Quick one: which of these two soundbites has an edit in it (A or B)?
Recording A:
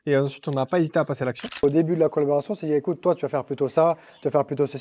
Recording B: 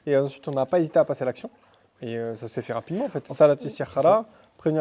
A